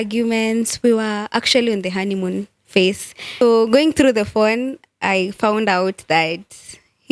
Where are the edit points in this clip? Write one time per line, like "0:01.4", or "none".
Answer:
0:03.4

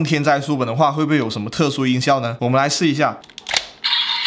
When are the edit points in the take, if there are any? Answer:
0:02.3
0:03.3

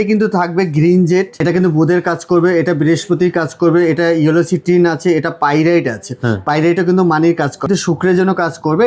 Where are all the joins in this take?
0:01.4
0:07.7

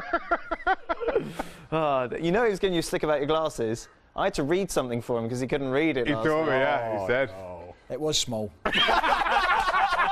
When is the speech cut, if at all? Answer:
0:05.9

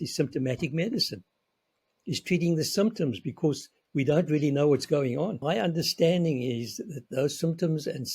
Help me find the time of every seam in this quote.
0:05.4

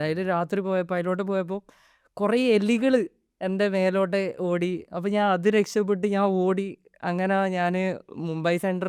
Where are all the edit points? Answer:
none

